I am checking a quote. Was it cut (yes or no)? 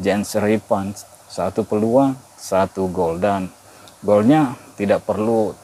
yes